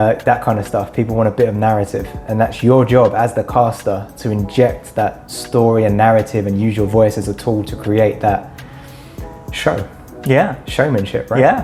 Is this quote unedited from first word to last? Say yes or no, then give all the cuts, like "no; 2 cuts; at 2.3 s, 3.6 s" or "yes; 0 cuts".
yes; 0 cuts